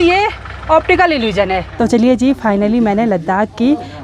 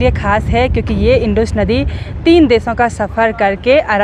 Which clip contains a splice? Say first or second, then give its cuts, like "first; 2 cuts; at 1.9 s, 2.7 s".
first; 1 cut; at 1.7 s